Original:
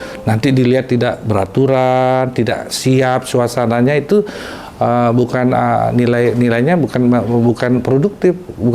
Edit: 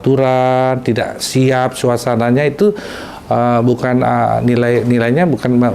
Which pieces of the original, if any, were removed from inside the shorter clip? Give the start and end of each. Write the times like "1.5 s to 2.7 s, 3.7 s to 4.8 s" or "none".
none